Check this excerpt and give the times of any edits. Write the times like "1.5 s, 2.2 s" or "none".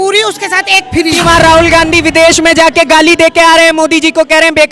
1.2 s